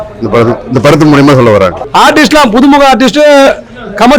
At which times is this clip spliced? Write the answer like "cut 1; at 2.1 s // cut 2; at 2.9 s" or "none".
cut 1; at 1.8 s